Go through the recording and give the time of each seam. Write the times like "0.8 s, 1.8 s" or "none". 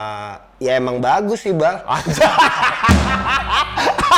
none